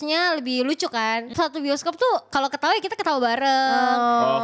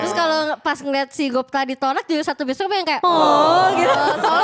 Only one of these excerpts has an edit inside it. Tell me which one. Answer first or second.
first